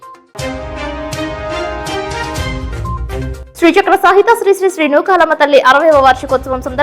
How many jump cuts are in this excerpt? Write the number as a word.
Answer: one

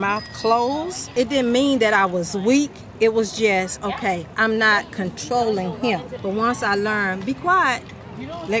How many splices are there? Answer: two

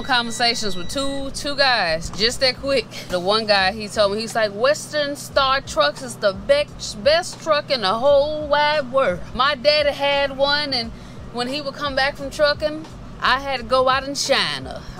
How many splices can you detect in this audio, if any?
three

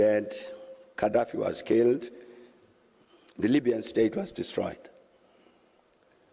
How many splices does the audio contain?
zero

